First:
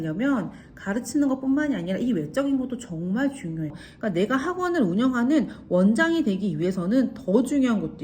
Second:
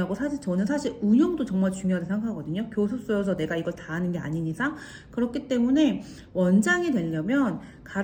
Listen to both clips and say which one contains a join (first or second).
first